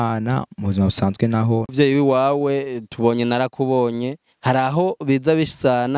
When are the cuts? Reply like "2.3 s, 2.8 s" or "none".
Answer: 1.7 s